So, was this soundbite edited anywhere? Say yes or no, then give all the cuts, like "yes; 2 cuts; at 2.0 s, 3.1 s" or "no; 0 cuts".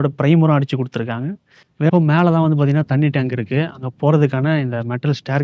yes; 1 cut; at 1.9 s